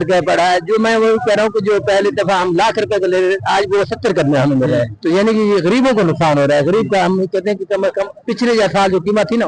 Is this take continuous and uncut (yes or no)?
no